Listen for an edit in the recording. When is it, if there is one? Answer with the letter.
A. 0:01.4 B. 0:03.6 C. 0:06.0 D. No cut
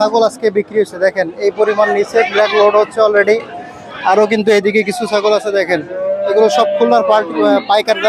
D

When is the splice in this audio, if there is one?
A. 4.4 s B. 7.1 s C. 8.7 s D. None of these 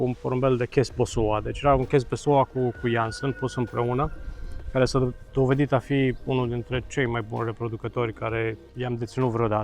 C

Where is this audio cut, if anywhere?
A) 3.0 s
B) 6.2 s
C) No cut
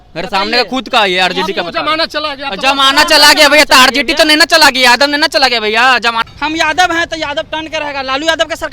B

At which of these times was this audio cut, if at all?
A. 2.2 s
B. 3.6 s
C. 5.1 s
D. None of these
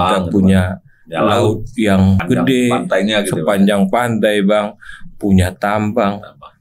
A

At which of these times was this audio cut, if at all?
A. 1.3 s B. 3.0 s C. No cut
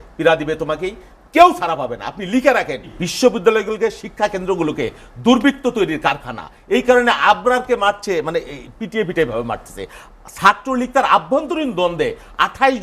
B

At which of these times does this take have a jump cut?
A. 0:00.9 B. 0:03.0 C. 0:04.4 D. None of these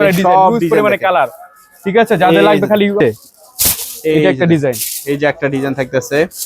B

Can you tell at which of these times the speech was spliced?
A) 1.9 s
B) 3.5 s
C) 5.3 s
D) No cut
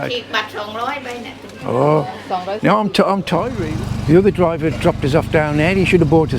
B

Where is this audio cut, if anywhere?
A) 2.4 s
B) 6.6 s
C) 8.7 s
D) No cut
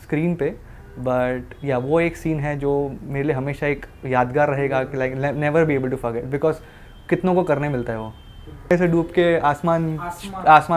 C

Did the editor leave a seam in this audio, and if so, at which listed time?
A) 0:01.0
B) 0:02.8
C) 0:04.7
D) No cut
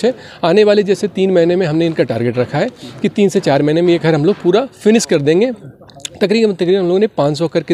D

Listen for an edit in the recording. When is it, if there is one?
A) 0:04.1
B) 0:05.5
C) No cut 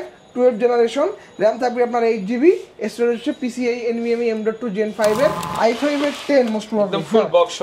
B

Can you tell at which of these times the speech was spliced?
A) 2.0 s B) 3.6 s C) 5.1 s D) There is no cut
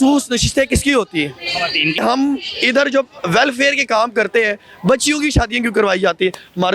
A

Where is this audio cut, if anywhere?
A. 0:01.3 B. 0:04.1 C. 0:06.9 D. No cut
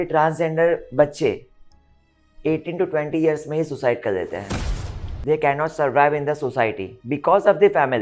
C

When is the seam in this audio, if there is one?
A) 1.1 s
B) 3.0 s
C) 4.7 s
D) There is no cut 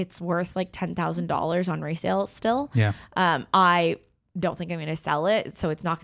D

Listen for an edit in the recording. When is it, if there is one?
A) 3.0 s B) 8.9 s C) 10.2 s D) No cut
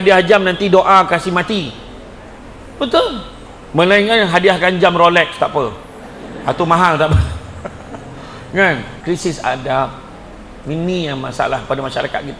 B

